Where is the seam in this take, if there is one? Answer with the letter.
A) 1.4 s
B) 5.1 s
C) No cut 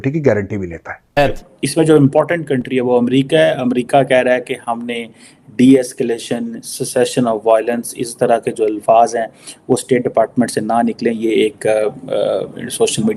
A